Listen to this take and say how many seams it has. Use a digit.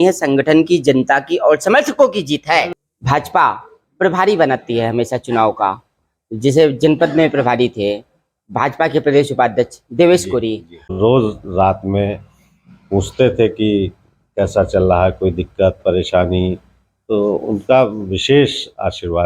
2